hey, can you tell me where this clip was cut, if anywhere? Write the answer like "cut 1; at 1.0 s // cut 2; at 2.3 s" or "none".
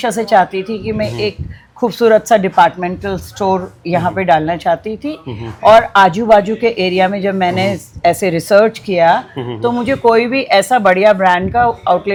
none